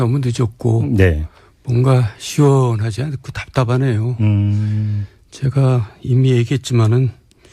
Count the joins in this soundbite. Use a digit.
1